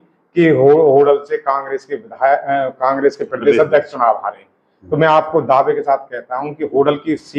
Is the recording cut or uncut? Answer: uncut